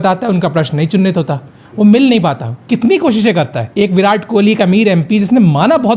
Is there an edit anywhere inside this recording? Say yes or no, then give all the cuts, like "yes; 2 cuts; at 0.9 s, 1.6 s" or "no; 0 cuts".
yes; 1 cut; at 3.6 s